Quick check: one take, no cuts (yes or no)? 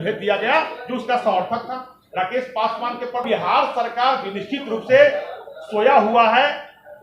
no